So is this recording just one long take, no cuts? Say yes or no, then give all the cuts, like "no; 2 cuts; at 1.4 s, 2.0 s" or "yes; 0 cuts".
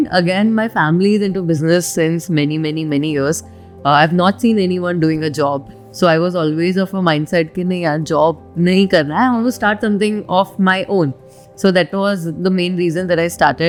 yes; 0 cuts